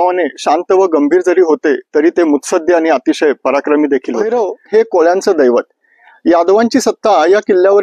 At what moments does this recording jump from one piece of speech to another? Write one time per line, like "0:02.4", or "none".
0:04.3